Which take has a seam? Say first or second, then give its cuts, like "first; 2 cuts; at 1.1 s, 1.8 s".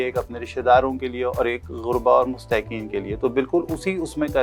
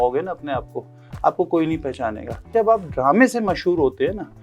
second; 1 cut; at 2.5 s